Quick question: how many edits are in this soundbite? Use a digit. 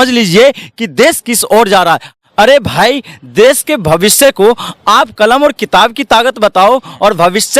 1